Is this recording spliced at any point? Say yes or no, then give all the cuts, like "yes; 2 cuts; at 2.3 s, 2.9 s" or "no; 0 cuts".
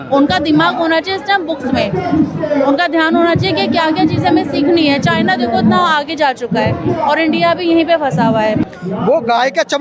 yes; 1 cut; at 8.6 s